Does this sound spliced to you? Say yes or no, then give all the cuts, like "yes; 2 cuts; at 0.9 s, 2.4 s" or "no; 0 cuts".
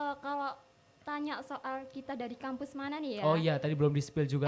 no; 0 cuts